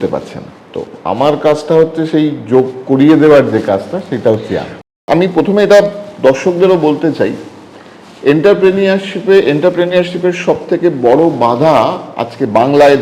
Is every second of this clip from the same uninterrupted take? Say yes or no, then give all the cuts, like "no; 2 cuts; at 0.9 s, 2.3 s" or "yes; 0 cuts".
no; 1 cut; at 5.0 s